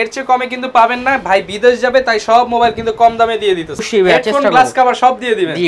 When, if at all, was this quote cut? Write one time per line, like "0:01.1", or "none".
0:03.9